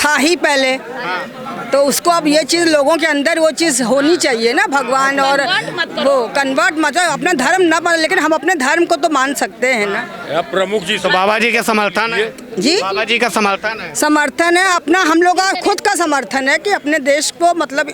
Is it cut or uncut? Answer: uncut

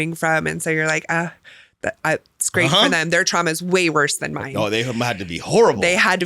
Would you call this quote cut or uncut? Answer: uncut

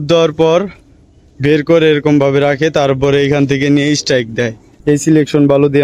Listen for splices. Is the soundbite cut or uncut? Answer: cut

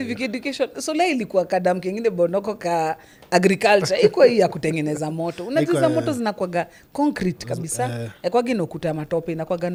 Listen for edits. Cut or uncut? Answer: uncut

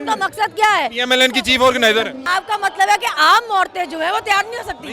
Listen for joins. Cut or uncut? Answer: cut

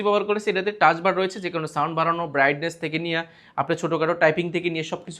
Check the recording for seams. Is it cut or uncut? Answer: uncut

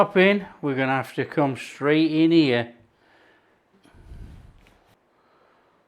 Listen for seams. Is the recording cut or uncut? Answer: cut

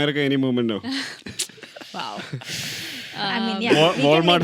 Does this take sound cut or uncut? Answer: uncut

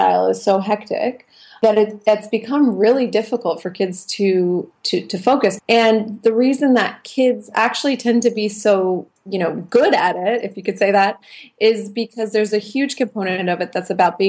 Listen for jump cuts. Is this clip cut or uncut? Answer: cut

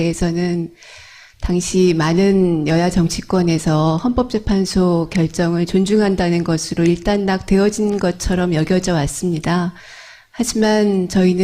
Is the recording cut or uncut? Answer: cut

